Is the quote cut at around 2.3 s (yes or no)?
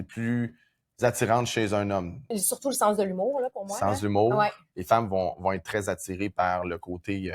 yes